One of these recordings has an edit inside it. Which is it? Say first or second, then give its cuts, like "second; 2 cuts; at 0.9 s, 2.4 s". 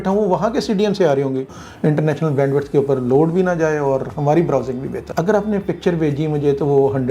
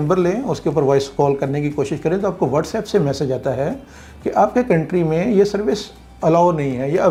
first; 2 cuts; at 1.6 s, 5.0 s